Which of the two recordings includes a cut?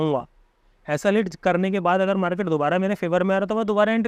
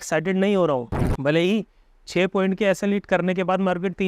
second; 1 cut; at 1.0 s

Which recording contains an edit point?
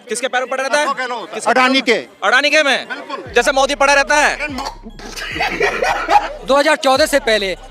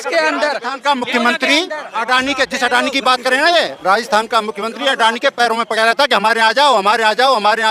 first; 2 cuts; at 4.6 s, 6.2 s

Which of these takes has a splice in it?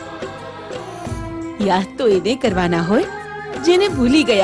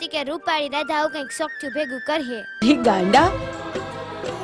second; 1 cut; at 2.6 s

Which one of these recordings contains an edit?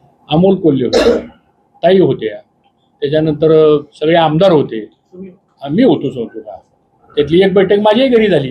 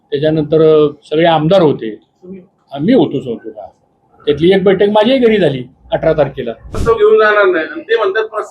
second; 1 cut; at 6.8 s

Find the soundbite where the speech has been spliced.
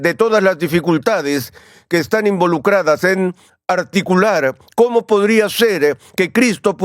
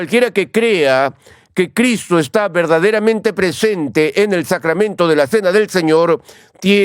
first; 1 cut; at 3.5 s

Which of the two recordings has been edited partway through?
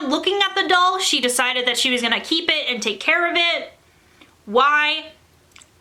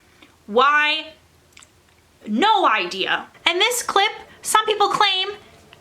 second; 1 cut; at 3.3 s

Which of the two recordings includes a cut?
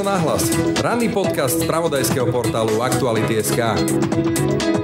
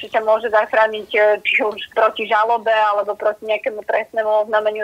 second; 1 cut; at 1.8 s

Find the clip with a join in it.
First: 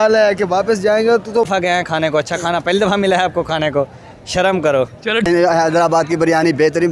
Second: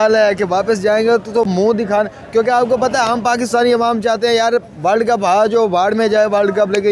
first; 2 cuts; at 1.5 s, 5.3 s

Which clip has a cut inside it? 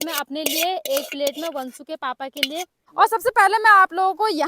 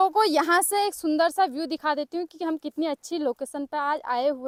first; 1 cut; at 2.8 s

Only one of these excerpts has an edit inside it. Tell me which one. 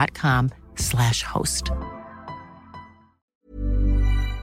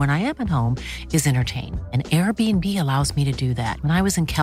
first; 1 cut; at 3.3 s

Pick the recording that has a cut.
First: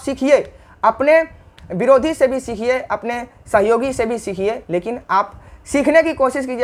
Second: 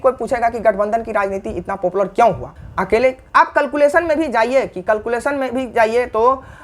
second; 1 cut; at 2.5 s

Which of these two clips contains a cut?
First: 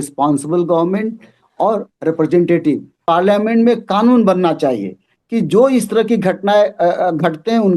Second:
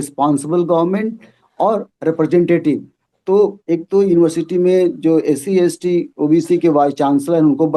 first; 1 cut; at 2.9 s

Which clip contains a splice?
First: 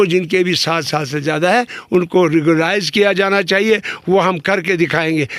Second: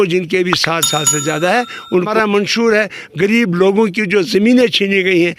second; 1 cut; at 2.1 s

